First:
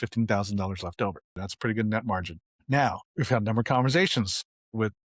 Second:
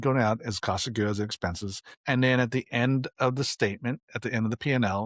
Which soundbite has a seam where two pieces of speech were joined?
first; 1 cut; at 1.4 s

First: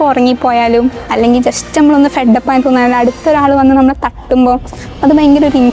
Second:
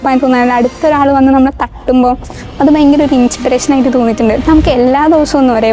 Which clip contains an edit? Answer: second; 1 cut; at 4.4 s

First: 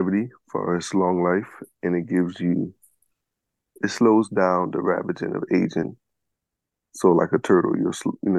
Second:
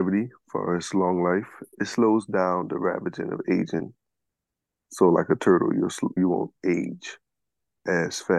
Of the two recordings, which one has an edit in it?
second; 2 cuts; at 1.6 s, 6.2 s

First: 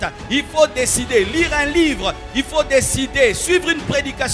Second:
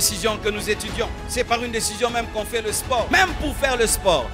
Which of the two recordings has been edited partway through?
second; 2 cuts; at 1.2 s, 3.1 s

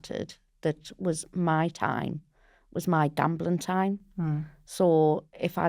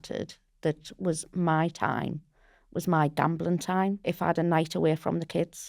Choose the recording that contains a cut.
second; 1 cut; at 4.0 s

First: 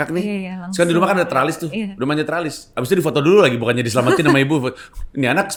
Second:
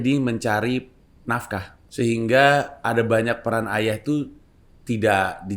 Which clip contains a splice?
second; 1 cut; at 1.8 s

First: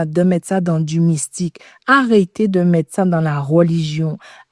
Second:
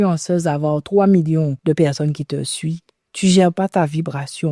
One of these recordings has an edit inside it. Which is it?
second; 1 cut; at 1.6 s

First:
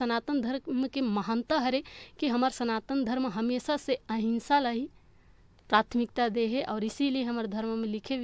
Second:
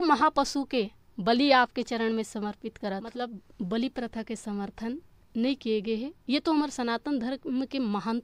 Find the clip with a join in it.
second; 1 cut; at 3.4 s

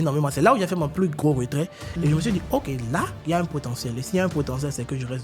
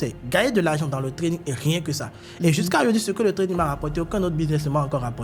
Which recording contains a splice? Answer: first; 2 cuts; at 0.9 s, 3.2 s

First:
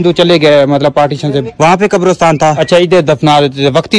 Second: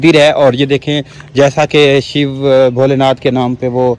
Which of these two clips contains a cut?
first; 2 cuts; at 1.5 s, 2.6 s

